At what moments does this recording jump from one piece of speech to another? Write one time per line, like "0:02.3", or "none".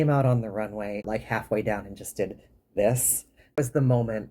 0:01.0
0:03.6